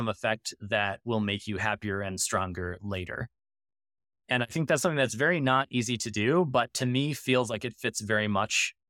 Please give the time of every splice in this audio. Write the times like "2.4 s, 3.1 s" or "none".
none